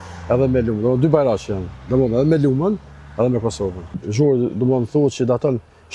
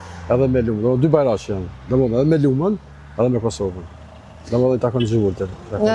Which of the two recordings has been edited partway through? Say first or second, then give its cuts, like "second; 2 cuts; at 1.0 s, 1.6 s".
first; 1 cut; at 4.0 s